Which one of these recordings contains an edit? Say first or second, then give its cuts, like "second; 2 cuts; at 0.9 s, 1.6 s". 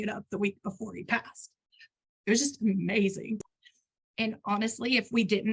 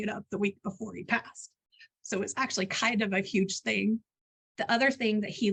first; 1 cut; at 1.9 s